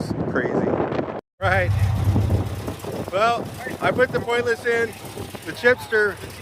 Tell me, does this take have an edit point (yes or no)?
no